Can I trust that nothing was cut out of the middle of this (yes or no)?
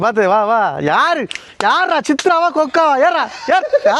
yes